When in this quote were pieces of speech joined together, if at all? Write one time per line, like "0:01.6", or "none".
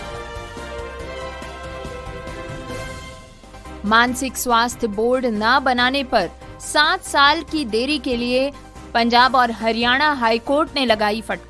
0:03.8